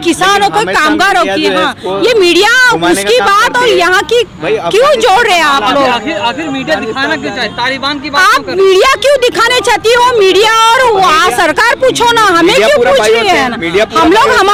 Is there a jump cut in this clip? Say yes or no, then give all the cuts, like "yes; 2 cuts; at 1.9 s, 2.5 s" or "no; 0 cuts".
no; 0 cuts